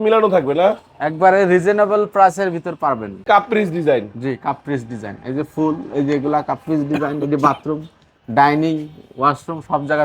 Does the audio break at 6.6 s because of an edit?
no; 1 cut; at 3.2 s

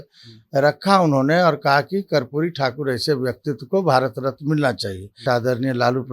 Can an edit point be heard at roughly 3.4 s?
no; 1 cut; at 5.2 s

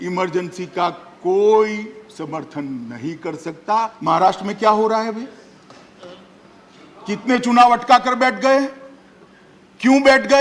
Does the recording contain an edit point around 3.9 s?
yes; 1 cut; at 3.9 s

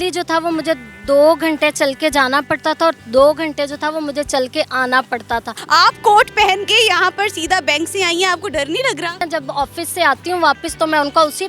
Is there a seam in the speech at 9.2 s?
yes; 2 cuts; at 5.5 s, 9.2 s

